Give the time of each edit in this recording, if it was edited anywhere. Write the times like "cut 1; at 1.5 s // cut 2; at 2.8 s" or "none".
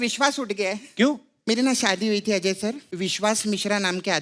cut 1; at 1.3 s // cut 2; at 2.9 s